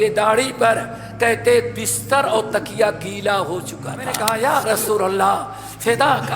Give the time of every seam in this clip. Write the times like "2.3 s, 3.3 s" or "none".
4.2 s